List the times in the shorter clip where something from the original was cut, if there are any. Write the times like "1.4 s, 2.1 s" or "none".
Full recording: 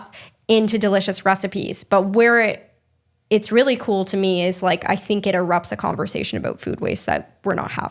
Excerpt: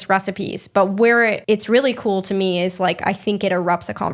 1.4 s